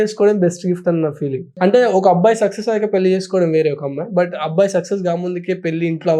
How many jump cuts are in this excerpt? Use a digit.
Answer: 1